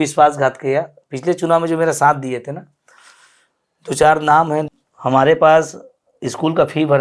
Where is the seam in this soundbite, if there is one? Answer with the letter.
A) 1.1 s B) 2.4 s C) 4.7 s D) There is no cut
C